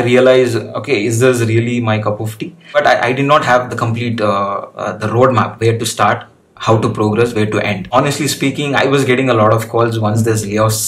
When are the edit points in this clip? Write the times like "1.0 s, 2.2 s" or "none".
2.7 s, 7.8 s